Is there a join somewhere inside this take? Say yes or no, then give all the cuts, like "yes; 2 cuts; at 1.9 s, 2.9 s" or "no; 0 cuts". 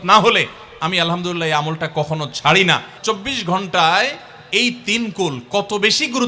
yes; 1 cut; at 3.0 s